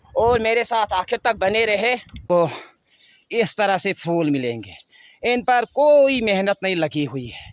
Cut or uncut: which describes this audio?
cut